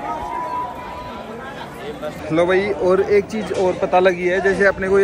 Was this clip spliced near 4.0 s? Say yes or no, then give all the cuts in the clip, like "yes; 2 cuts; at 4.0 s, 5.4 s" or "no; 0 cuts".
no; 1 cut; at 2.2 s